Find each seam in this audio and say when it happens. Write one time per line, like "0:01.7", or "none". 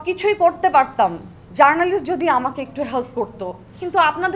none